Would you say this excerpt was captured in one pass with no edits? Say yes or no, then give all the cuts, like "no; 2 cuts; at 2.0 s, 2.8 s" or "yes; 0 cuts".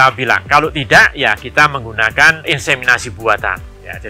yes; 0 cuts